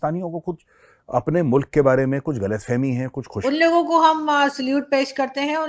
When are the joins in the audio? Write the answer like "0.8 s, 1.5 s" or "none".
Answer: 3.3 s